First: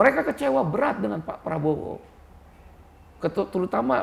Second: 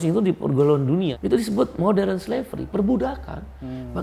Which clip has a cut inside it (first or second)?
second